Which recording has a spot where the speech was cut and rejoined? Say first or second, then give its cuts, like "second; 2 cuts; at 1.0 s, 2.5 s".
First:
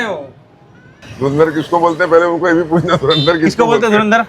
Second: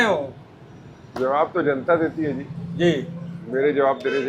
first; 1 cut; at 1.0 s